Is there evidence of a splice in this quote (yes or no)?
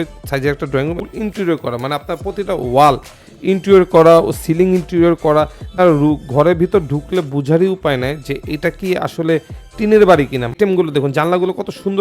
yes